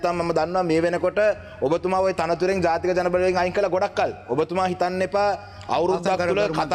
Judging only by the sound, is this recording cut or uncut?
uncut